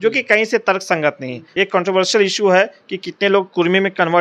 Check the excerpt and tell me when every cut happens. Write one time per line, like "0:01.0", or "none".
0:01.4